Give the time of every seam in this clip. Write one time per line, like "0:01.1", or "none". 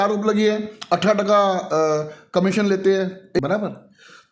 0:03.4